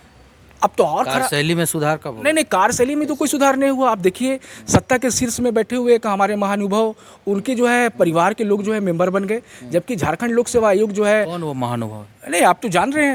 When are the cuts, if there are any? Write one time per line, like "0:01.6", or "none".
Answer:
none